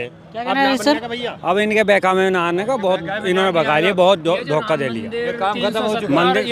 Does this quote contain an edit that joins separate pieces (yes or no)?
no